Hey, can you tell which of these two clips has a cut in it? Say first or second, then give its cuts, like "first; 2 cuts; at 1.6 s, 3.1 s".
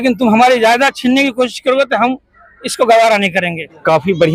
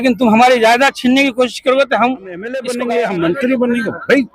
second; 1 cut; at 2.6 s